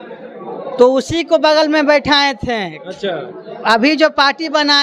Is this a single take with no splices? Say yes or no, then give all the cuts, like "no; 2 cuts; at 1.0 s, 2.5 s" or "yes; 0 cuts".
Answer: yes; 0 cuts